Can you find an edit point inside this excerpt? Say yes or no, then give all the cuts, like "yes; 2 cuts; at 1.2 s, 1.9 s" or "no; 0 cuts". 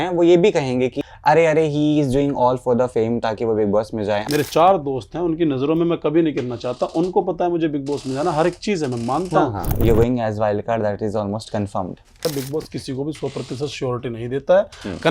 yes; 4 cuts; at 1.1 s, 4.2 s, 9.7 s, 12.3 s